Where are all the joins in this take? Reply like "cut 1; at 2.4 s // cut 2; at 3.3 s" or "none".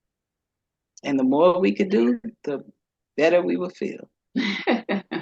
none